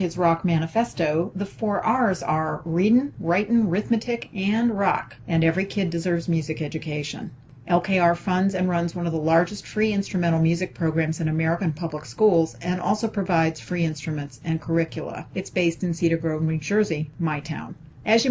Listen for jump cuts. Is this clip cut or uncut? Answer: uncut